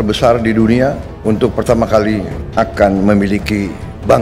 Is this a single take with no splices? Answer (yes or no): no